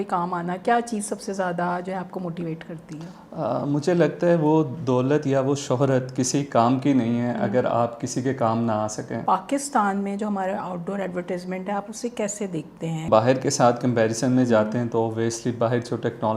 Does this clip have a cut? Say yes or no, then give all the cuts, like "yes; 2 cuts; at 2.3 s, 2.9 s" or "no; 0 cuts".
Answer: yes; 2 cuts; at 9.2 s, 13.1 s